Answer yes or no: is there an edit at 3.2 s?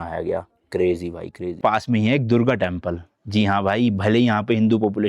no